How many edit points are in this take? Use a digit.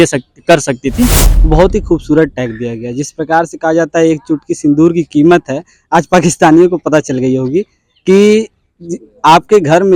1